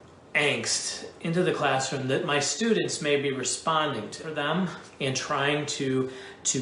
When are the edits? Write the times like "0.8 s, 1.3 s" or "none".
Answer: 4.3 s